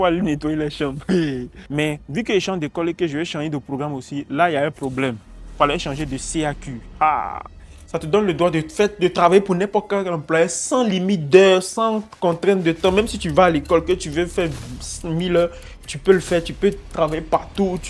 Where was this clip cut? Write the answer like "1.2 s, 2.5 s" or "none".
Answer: 1.5 s, 7.9 s